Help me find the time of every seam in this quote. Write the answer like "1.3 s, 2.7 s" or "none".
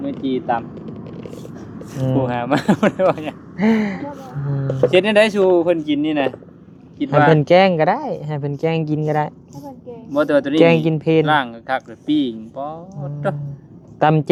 none